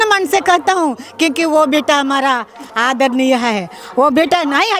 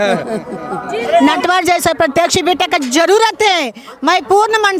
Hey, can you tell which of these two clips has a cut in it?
second; 1 cut; at 1.2 s

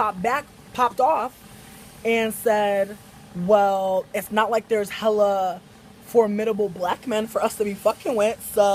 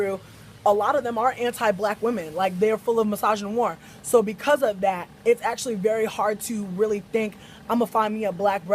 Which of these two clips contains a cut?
second; 1 cut; at 1.7 s

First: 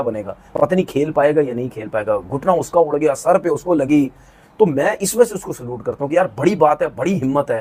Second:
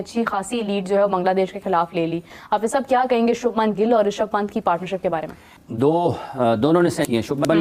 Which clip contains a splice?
first; 1 cut; at 1.5 s

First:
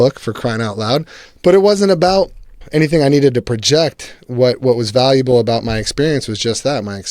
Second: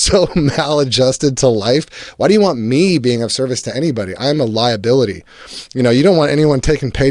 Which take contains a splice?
first; 2 cuts; at 1.2 s, 2.6 s

